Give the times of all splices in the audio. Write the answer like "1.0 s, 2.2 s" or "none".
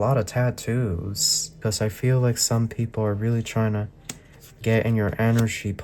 1.6 s

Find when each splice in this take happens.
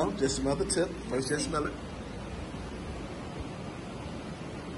none

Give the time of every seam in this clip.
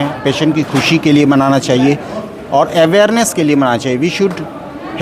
none

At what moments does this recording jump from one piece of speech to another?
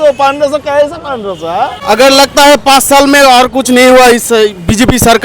1.8 s

